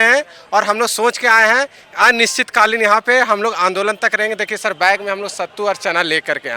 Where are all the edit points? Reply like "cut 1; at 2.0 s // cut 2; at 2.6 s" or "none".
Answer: none